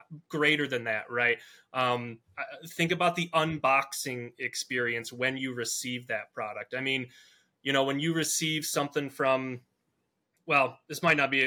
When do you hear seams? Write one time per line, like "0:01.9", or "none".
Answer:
none